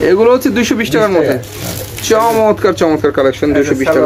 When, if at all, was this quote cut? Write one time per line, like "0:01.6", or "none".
none